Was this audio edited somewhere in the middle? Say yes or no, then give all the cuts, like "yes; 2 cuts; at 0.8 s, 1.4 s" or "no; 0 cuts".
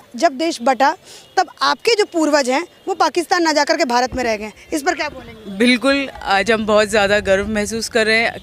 no; 0 cuts